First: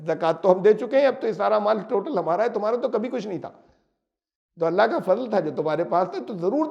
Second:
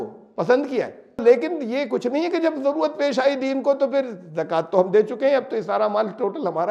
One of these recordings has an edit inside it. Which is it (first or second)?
second